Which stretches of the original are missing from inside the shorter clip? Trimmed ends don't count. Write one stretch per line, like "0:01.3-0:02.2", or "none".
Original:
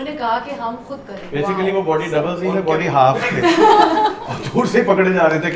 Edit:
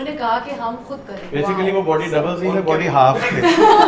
none